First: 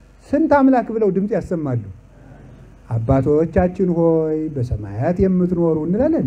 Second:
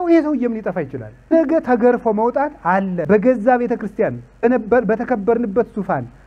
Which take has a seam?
second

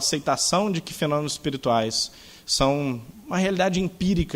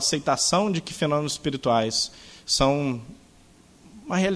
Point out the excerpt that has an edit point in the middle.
first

